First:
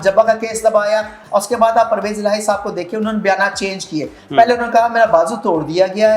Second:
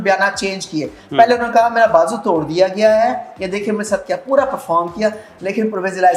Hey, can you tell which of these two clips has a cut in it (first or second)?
first